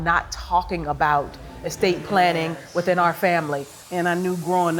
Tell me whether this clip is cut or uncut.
cut